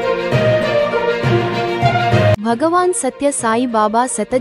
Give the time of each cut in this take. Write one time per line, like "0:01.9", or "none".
0:02.4